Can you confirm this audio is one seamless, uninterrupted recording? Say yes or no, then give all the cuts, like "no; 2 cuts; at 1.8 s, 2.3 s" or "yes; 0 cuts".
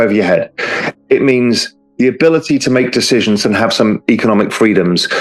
yes; 0 cuts